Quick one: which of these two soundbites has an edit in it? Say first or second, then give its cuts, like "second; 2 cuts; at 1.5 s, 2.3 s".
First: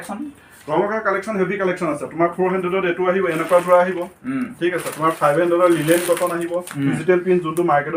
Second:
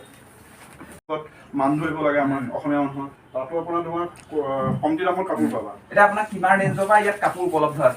second; 1 cut; at 1.1 s